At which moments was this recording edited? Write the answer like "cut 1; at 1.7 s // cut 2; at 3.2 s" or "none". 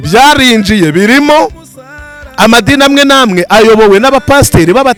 none